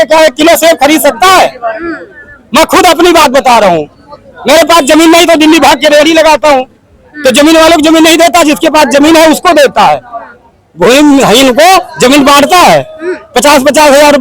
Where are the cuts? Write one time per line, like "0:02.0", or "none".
none